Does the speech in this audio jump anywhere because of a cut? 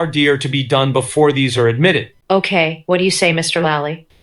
no; 0 cuts

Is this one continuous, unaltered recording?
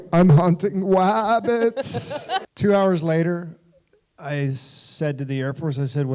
no; 1 cut; at 2.5 s

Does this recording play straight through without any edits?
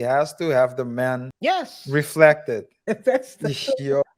no; 2 cuts; at 1.3 s, 2.7 s

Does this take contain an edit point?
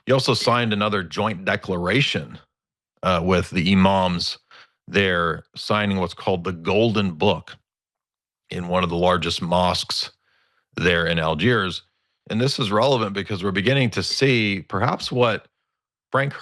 no; 0 cuts

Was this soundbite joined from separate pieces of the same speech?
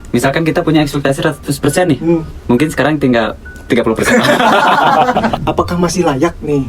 yes; 1 cut; at 5.4 s

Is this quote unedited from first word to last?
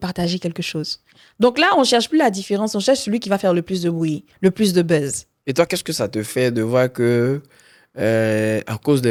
yes; 0 cuts

